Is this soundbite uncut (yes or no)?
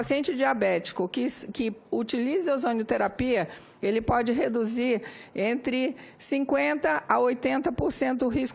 yes